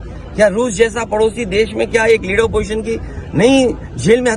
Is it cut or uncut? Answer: uncut